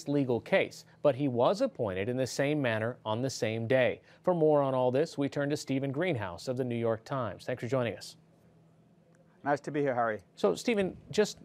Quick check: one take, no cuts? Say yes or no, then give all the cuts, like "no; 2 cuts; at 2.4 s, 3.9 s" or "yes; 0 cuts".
yes; 0 cuts